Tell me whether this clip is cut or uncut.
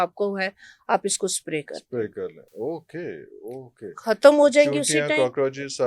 uncut